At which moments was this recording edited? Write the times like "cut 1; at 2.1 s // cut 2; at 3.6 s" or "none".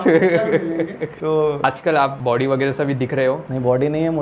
cut 1; at 1.6 s